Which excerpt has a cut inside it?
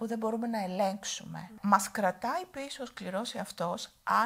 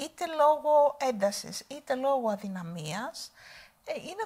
first; 1 cut; at 1.6 s

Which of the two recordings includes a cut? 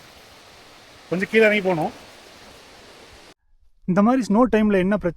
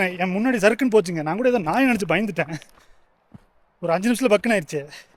first; 1 cut; at 3.3 s

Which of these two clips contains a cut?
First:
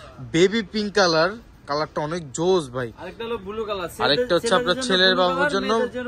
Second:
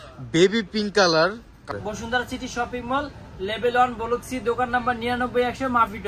second; 1 cut; at 1.6 s

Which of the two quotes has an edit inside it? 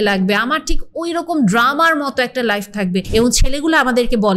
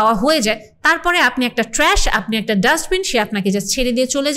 first; 1 cut; at 3.1 s

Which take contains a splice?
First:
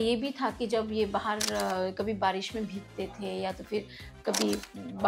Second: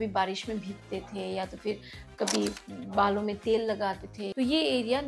second; 1 cut; at 4.2 s

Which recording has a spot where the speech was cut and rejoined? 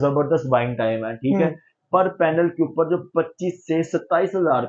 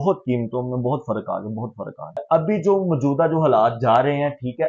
second; 1 cut; at 2.2 s

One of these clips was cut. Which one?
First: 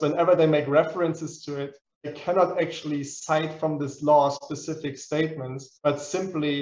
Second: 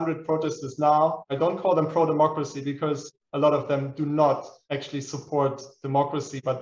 second; 3 cuts; at 1.2 s, 3.1 s, 4.5 s

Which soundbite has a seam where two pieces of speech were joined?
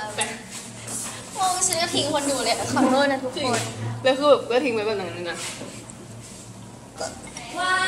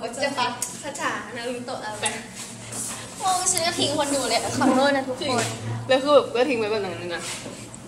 first; 1 cut; at 7.0 s

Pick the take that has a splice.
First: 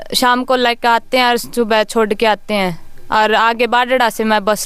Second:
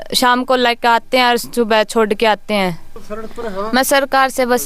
second; 1 cut; at 2.9 s

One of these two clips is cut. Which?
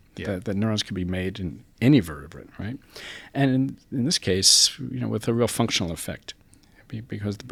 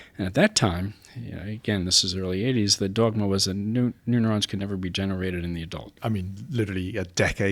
second; 1 cut; at 5.9 s

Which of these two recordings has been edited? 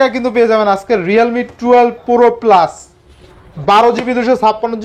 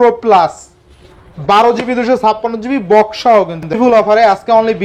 second; 1 cut; at 3.7 s

